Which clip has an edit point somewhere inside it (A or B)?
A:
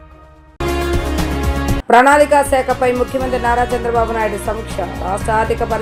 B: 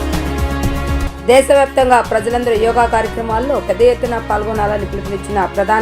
B